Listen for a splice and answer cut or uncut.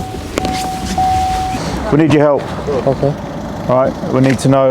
uncut